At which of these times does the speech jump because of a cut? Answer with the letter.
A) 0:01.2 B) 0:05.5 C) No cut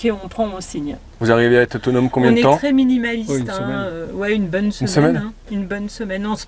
A